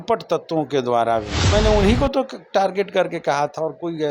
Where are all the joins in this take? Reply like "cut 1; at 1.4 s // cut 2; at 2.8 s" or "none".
cut 1; at 1.4 s